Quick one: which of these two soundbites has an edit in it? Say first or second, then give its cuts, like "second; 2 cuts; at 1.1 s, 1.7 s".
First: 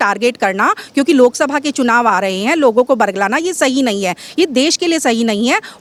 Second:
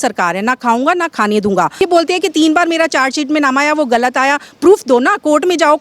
second; 1 cut; at 1.8 s